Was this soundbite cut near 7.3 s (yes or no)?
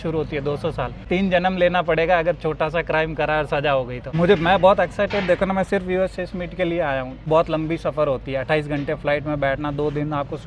yes